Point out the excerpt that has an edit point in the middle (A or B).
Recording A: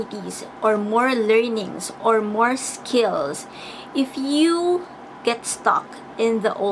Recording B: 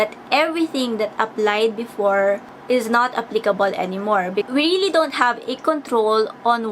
B